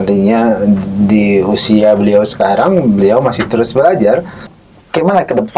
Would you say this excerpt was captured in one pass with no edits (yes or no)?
no